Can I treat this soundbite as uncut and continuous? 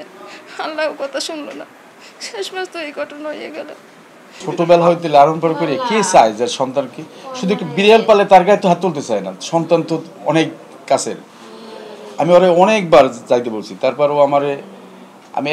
yes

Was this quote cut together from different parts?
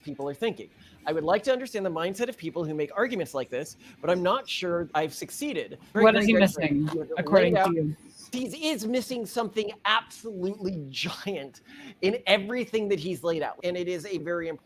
yes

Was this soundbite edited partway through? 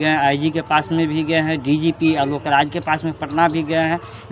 no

